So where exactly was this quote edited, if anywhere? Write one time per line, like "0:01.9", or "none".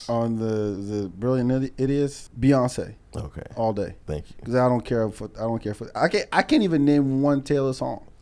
0:02.2